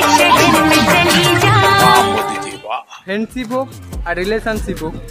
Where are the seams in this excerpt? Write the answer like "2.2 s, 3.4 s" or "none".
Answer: 2.9 s

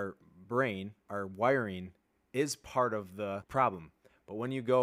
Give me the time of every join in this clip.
1.0 s, 3.5 s

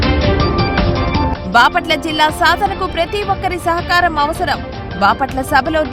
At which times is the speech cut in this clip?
1.0 s

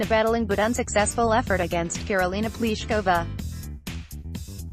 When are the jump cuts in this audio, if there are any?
3.3 s

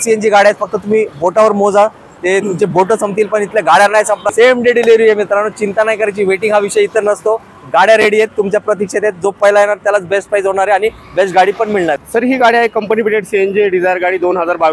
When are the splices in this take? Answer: 4.3 s, 12.0 s

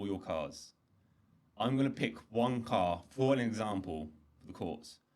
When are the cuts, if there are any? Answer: none

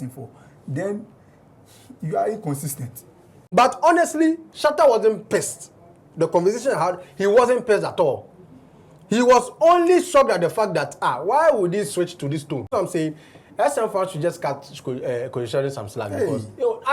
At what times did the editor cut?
3.4 s, 12.7 s

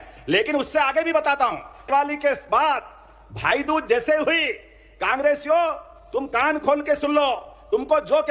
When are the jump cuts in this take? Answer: 1.9 s

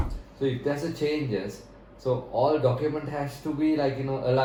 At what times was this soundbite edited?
none

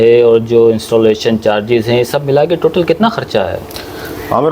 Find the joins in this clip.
none

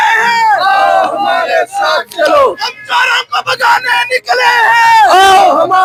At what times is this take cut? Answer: none

